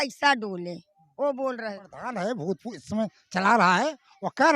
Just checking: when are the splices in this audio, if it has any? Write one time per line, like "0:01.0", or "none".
0:01.9